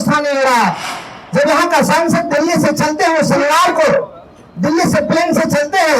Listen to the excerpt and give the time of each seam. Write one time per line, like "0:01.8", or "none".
0:00.9